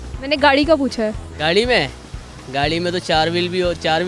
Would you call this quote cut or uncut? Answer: uncut